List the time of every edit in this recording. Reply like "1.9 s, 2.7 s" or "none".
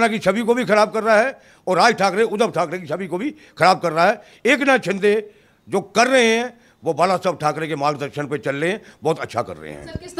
none

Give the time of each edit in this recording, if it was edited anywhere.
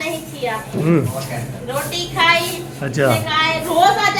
none

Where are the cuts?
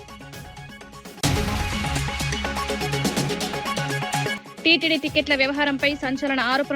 1.2 s, 2.7 s, 4.5 s

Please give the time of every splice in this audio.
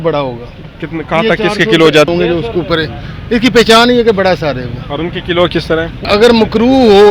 2.1 s, 6.0 s

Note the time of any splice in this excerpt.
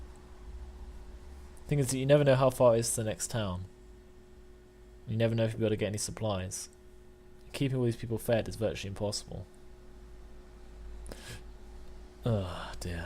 1.5 s

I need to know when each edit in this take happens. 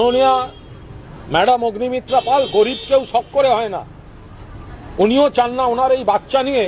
none

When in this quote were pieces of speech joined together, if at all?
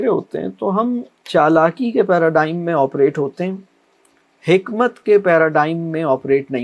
1.1 s

